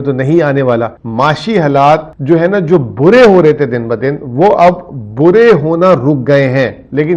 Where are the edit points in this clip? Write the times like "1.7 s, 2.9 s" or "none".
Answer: 1.0 s, 2.1 s